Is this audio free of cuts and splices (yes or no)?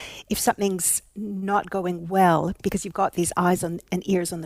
yes